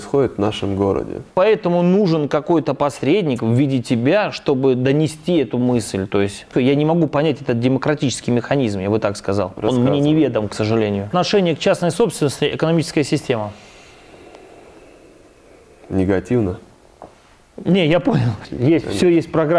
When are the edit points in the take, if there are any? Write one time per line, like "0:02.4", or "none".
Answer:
0:01.3
0:06.5
0:11.1
0:18.5